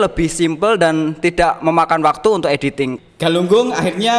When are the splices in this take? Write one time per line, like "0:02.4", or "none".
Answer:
0:02.9